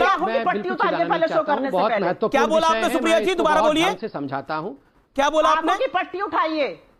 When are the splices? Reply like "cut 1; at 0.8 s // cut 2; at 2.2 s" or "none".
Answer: none